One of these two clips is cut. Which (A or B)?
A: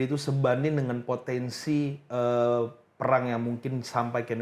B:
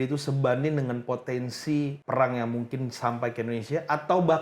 B